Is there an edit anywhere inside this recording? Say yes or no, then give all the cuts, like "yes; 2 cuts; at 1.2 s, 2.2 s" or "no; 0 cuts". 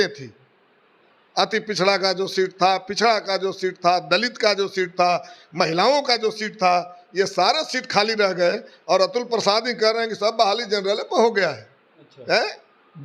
no; 0 cuts